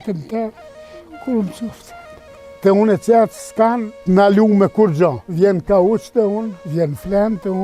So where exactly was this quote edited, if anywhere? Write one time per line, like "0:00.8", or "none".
0:02.5
0:03.9
0:05.2
0:06.6